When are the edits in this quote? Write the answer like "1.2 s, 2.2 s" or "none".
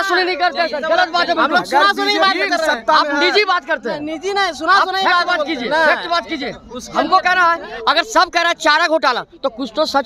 none